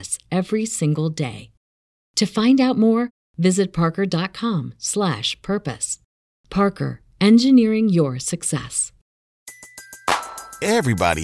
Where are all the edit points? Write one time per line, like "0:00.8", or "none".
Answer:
0:09.3